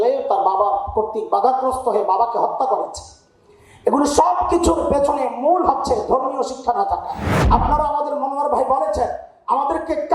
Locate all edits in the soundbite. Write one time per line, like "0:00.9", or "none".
0:07.3